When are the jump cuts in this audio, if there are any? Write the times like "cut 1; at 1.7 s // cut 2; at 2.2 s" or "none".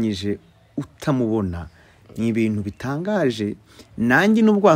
none

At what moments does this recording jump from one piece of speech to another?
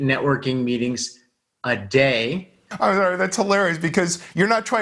cut 1; at 2.6 s

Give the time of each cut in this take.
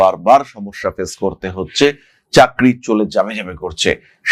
none

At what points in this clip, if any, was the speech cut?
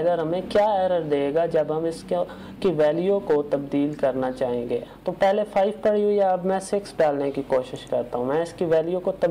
cut 1; at 4.9 s

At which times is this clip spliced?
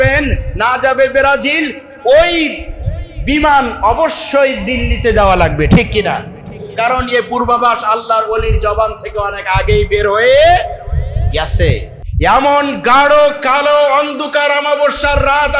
cut 1; at 11.9 s

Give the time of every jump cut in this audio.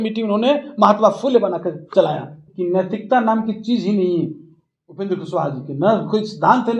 cut 1; at 2.4 s

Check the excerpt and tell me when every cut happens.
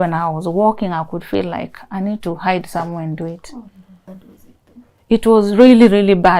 cut 1; at 4.1 s

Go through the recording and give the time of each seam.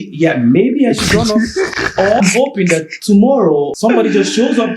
cut 1; at 1.9 s // cut 2; at 3.7 s

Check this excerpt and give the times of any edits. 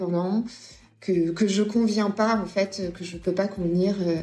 none

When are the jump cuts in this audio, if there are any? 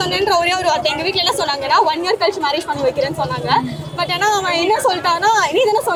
none

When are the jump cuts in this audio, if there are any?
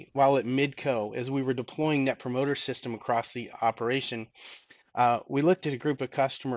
cut 1; at 3.5 s

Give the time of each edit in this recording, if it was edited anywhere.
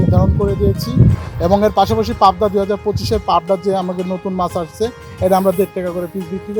cut 1; at 1.2 s

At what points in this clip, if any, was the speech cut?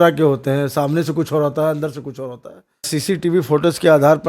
cut 1; at 2.9 s

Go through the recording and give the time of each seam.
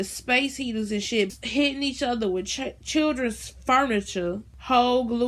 cut 1; at 1.3 s

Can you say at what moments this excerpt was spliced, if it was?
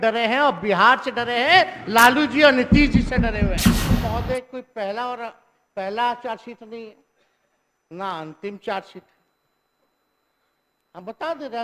cut 1; at 4.0 s

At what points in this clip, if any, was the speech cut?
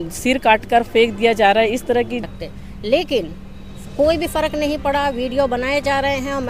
cut 1; at 2.2 s

